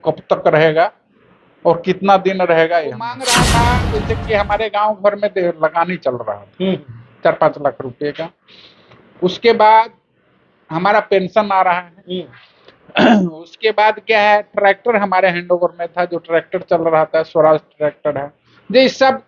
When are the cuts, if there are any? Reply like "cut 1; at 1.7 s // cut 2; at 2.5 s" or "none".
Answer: cut 1; at 3.2 s

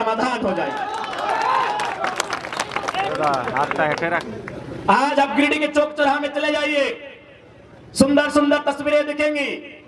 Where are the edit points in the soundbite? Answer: none

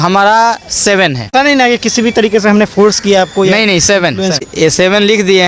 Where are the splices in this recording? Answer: cut 1; at 1.3 s // cut 2; at 4.4 s

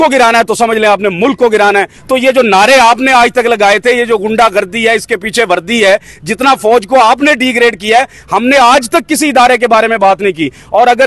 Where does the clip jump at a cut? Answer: cut 1; at 2.0 s

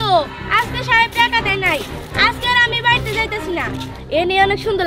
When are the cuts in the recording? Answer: none

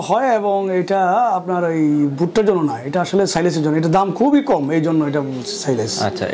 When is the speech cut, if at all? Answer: none

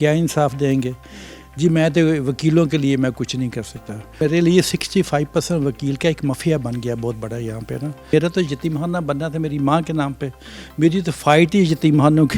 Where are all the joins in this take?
cut 1; at 4.2 s // cut 2; at 8.1 s

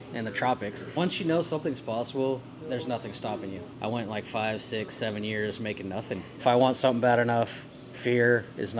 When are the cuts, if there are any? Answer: cut 1; at 1.0 s // cut 2; at 3.7 s // cut 3; at 6.4 s

